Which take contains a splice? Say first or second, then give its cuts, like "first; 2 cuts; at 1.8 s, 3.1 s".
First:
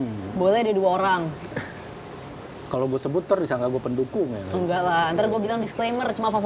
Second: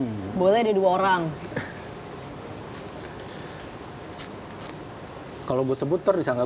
first; 1 cut; at 2.5 s